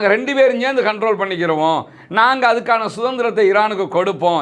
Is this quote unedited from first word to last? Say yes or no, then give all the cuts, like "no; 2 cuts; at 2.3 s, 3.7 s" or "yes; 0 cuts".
yes; 0 cuts